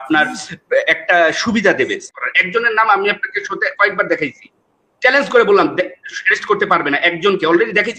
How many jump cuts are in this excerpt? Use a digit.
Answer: 1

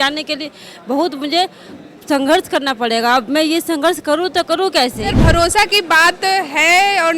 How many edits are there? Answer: 1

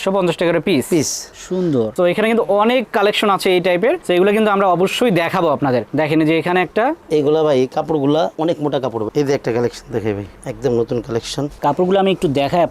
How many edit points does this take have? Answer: 3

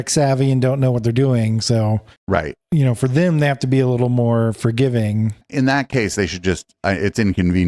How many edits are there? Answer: 1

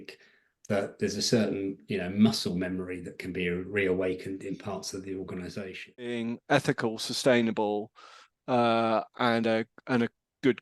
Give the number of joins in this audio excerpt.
1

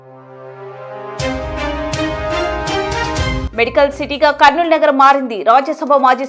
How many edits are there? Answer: 2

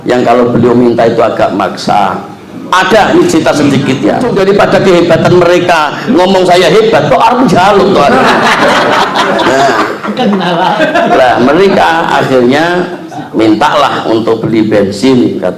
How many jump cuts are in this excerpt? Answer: 1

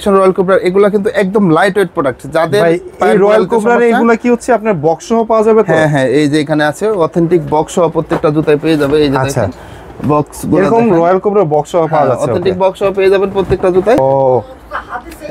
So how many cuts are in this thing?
1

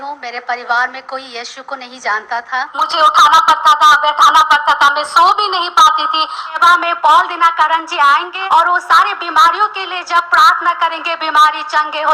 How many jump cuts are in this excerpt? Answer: 3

